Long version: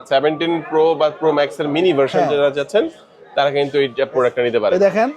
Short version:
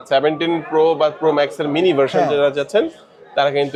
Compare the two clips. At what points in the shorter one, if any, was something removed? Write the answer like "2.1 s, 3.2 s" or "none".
none